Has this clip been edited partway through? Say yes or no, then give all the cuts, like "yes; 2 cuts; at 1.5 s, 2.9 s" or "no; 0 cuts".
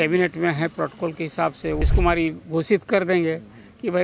yes; 1 cut; at 1.8 s